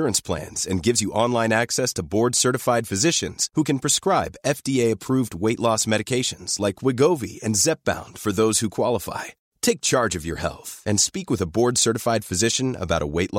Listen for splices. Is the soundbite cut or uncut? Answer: uncut